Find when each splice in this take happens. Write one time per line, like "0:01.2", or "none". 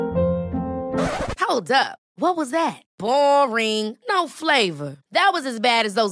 none